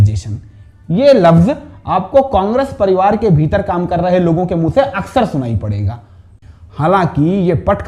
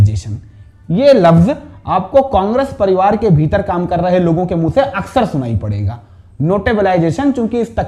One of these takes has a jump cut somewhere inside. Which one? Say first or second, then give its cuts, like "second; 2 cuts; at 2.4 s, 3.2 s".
first; 1 cut; at 6.3 s